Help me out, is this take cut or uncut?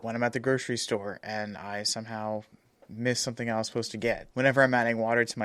uncut